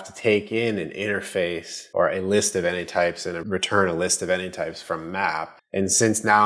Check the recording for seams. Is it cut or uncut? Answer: cut